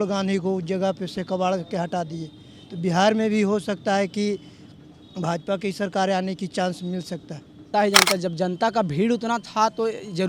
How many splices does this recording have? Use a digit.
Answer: 1